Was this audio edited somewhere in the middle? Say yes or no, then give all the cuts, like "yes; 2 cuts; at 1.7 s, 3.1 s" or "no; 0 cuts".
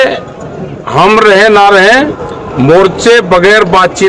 no; 0 cuts